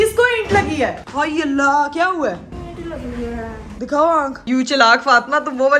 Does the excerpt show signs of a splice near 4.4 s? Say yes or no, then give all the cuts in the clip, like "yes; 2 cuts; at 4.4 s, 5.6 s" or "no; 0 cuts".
yes; 2 cuts; at 1.0 s, 4.4 s